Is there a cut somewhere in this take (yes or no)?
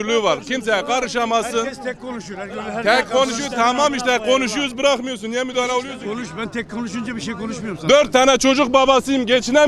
yes